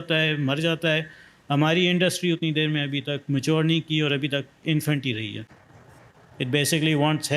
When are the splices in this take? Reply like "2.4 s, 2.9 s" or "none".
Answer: none